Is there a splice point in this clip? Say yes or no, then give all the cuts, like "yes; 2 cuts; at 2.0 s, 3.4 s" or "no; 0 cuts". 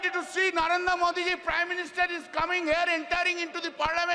no; 0 cuts